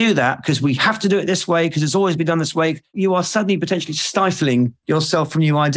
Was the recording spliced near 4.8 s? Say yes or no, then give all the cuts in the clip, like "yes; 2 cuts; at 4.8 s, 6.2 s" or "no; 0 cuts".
yes; 2 cuts; at 2.9 s, 4.8 s